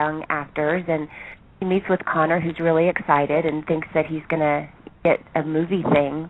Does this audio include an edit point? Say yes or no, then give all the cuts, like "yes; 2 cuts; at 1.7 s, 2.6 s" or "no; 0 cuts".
no; 0 cuts